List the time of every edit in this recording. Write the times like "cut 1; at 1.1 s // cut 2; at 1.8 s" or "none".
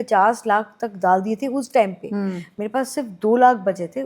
cut 1; at 2.5 s